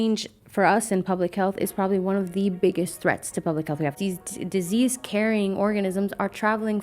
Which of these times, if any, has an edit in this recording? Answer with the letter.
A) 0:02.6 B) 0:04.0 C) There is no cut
B